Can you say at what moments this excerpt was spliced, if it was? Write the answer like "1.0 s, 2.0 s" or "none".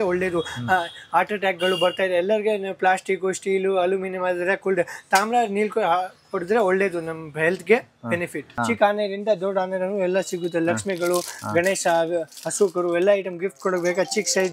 8.5 s